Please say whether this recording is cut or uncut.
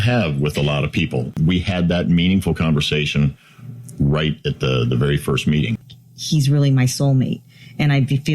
cut